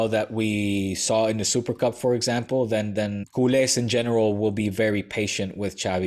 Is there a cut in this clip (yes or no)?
yes